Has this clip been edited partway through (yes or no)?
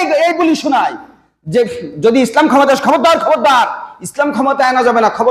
no